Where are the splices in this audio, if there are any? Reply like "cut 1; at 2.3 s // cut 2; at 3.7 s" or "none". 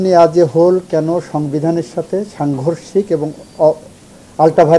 none